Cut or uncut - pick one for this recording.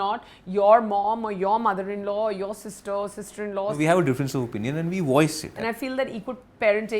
cut